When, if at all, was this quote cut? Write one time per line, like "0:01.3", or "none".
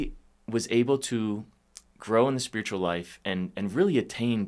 none